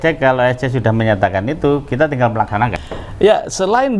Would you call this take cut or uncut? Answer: cut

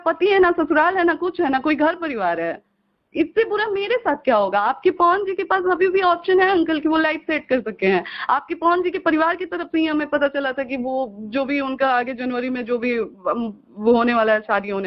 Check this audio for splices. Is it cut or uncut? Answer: uncut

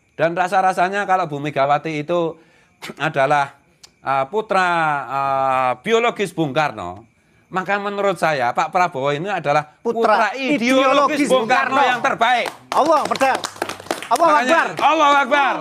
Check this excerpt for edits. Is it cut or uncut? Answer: uncut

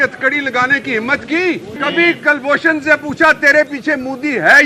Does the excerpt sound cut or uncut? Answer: cut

